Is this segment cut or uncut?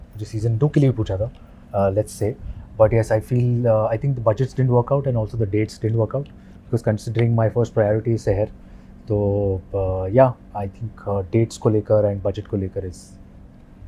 uncut